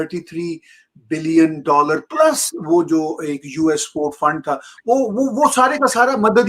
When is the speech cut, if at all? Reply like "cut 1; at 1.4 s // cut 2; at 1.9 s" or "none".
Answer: none